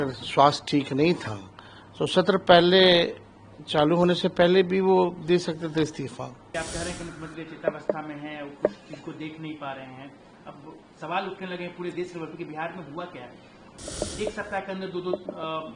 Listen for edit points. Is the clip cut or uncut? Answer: cut